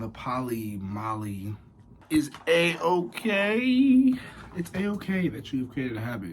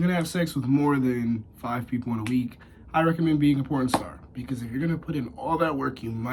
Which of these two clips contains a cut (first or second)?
first